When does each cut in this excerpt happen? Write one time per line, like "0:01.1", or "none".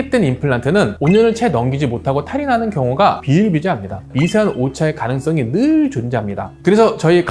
0:04.1